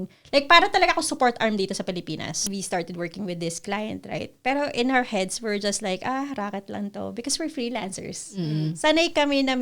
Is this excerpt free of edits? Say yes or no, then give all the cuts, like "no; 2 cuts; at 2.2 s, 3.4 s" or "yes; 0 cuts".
no; 1 cut; at 2.4 s